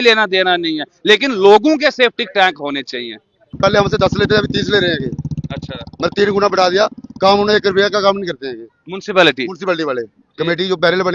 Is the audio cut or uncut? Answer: cut